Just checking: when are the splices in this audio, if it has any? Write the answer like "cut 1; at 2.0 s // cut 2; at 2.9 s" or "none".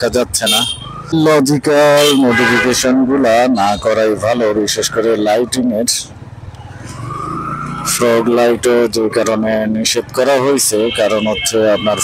cut 1; at 1.1 s